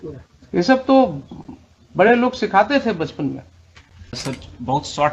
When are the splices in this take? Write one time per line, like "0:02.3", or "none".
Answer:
0:04.2

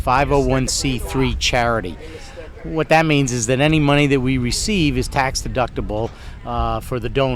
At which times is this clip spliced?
none

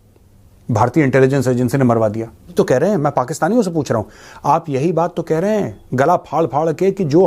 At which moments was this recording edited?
0:02.5

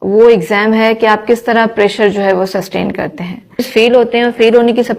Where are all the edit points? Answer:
0:03.7

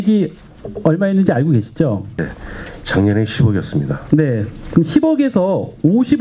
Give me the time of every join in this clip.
none

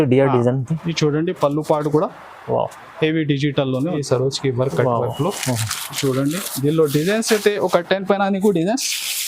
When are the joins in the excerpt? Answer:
0:04.0

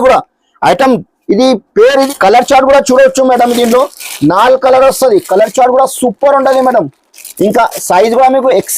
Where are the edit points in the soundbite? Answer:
0:02.1

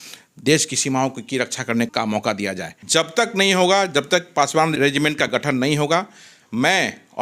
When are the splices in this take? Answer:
0:01.9
0:02.7
0:04.8

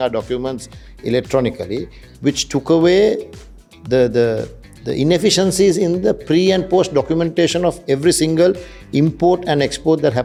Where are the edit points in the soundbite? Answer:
none

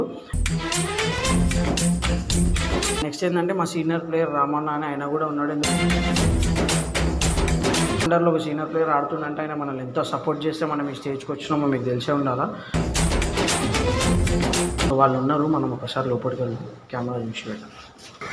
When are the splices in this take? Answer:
0:03.0
0:08.1
0:14.9

